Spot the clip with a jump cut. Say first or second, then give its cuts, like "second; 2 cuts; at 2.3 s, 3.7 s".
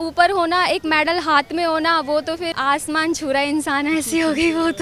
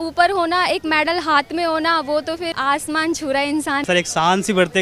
second; 1 cut; at 3.8 s